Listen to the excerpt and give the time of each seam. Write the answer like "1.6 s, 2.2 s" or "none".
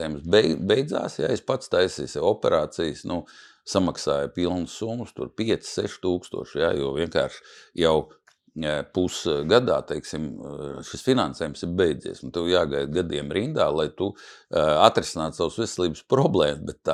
none